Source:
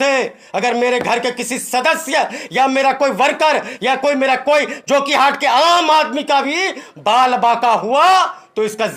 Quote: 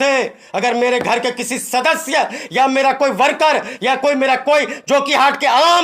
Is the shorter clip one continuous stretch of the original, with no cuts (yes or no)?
yes